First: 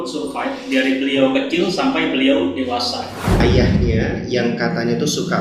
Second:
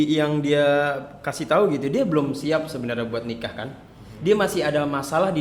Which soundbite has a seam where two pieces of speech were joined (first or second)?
first